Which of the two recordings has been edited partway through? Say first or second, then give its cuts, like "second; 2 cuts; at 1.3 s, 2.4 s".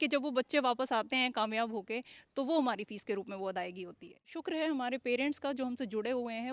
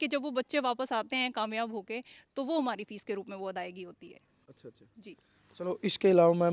first; 1 cut; at 4.3 s